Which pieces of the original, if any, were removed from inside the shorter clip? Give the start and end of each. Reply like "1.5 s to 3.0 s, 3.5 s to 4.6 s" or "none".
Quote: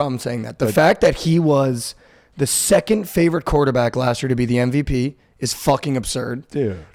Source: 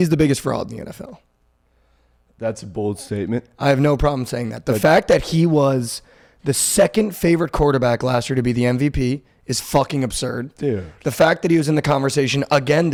none